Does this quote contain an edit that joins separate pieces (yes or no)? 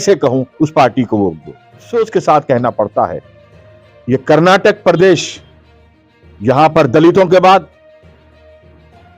yes